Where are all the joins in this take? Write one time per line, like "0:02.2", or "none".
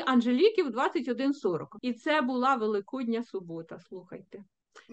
0:01.7